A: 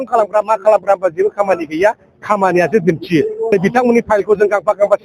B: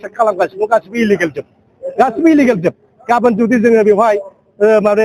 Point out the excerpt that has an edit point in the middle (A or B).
A